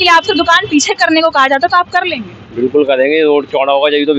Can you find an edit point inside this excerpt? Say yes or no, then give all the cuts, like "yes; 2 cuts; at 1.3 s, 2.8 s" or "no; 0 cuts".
no; 0 cuts